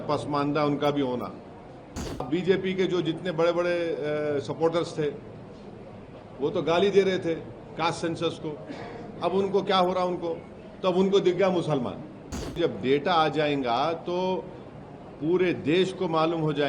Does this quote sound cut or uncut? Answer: cut